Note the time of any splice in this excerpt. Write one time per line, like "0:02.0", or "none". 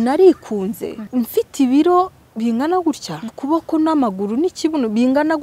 0:01.0
0:03.3